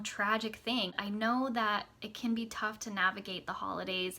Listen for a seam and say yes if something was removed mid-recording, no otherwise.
yes